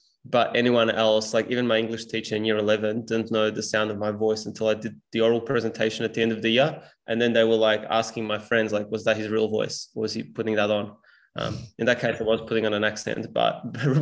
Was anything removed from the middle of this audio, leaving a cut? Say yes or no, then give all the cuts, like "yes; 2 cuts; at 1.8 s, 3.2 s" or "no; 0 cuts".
no; 0 cuts